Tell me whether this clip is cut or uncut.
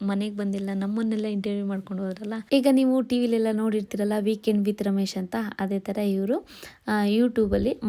cut